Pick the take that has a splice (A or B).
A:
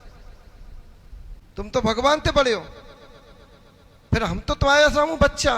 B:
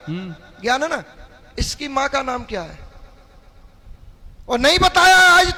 A